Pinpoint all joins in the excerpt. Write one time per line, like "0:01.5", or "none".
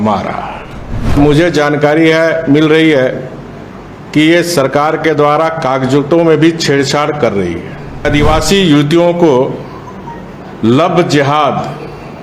0:01.2
0:08.0